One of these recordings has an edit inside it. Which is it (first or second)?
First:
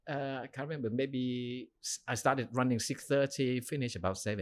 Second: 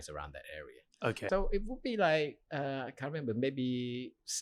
second